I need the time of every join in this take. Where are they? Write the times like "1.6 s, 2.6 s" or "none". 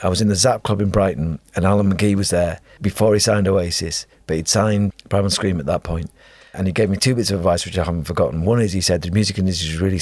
2.7 s, 4.9 s, 6.5 s

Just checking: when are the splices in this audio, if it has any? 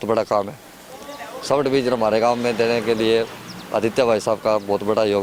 none

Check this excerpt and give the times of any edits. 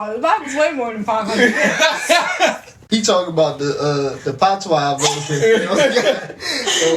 2.7 s

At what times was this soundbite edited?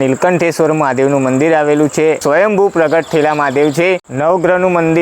2.2 s, 4.0 s

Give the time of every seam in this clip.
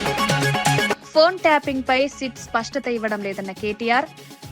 1.0 s

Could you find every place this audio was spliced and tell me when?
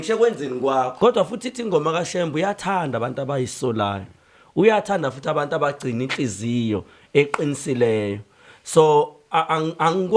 0.9 s

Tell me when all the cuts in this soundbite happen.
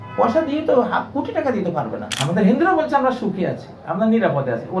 2.1 s

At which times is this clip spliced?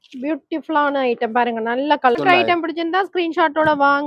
2.2 s

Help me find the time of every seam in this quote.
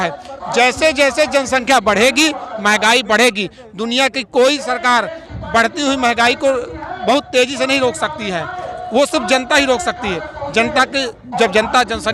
none

